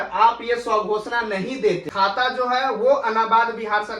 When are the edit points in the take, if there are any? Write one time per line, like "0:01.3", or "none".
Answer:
0:01.9